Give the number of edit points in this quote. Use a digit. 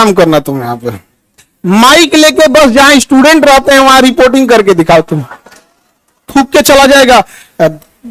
1